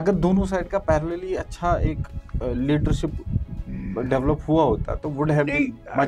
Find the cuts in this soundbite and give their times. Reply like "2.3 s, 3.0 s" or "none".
none